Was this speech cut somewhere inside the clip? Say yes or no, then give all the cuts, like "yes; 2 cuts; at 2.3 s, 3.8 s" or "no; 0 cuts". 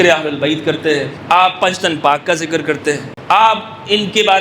yes; 2 cuts; at 1.1 s, 3.1 s